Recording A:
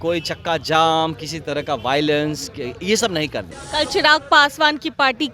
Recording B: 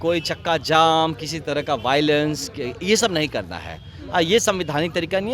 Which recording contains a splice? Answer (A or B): A